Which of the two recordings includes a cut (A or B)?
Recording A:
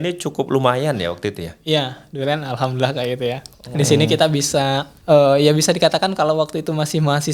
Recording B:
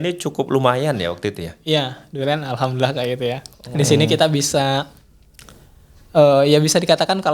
A